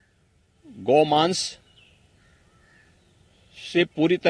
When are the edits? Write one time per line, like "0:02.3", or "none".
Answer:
none